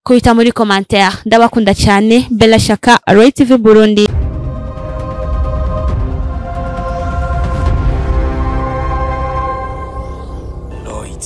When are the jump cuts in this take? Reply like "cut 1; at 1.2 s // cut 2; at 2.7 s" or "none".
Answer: cut 1; at 4.1 s